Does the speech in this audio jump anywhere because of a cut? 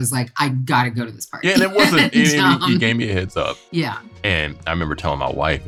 yes; 1 cut; at 4.0 s

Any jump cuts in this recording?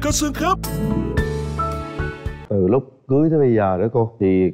no; 0 cuts

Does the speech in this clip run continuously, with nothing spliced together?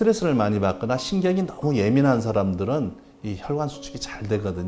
yes; 0 cuts

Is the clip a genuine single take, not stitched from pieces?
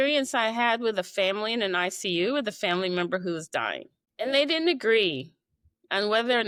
yes; 0 cuts

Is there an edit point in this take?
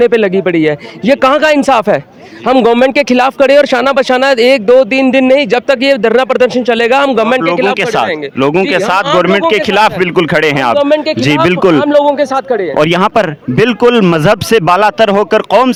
no; 0 cuts

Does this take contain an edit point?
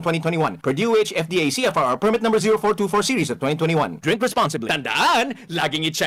no; 0 cuts

